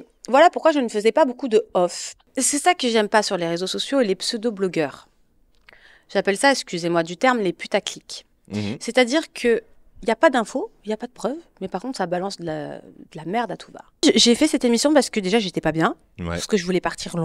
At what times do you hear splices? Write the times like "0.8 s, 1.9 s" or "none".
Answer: 2.3 s, 14.0 s

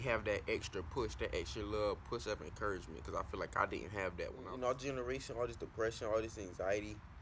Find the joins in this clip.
4.4 s

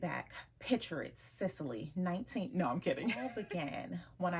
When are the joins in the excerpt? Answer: 3.3 s

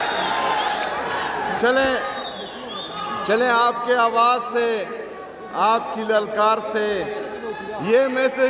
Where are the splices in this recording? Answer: none

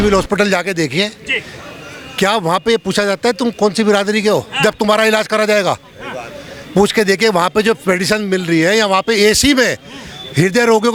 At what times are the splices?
none

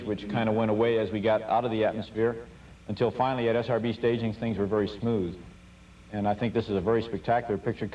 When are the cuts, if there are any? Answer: 7.0 s

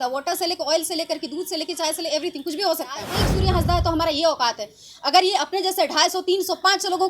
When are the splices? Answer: 3.2 s

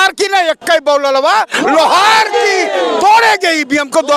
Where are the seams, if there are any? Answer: none

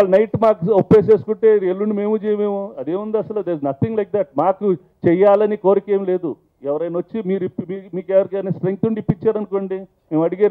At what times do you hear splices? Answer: none

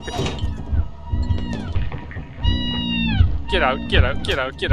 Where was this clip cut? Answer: 1.8 s

